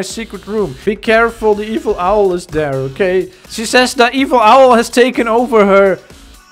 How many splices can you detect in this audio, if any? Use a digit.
2